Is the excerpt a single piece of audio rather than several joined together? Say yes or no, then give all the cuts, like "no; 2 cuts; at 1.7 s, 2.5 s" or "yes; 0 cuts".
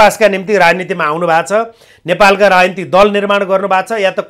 yes; 0 cuts